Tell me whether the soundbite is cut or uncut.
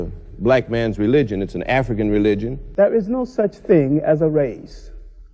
cut